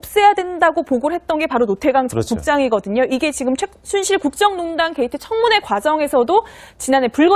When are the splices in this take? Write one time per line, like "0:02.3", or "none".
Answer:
none